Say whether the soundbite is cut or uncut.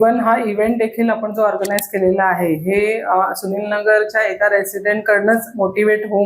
uncut